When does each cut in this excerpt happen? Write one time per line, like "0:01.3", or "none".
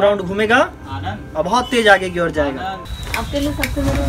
0:02.9